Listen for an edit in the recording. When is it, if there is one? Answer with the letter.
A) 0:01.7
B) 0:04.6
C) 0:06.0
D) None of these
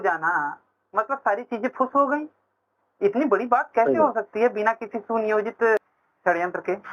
C